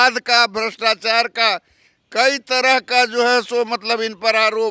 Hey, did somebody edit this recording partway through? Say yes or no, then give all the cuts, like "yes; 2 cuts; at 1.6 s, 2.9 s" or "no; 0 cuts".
no; 0 cuts